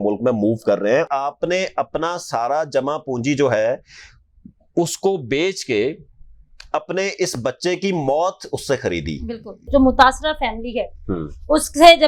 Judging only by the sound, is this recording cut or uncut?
cut